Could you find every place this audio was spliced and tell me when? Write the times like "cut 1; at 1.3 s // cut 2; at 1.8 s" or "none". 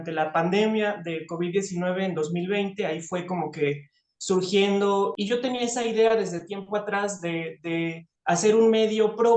cut 1; at 5.1 s